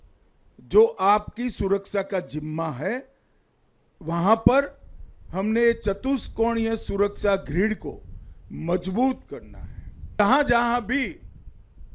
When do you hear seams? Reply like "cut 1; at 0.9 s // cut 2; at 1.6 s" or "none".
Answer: cut 1; at 10.0 s